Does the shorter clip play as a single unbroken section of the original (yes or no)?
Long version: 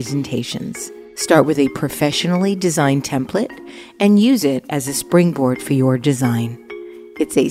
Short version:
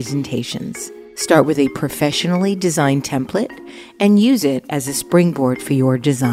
yes